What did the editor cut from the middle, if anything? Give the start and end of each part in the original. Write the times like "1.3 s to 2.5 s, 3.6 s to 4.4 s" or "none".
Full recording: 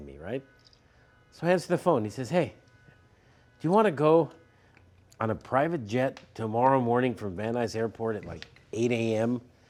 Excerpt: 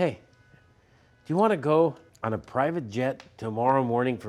4.4 s to 5.1 s